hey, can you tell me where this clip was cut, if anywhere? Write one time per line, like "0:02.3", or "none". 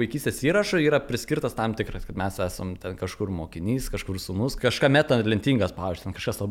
0:04.5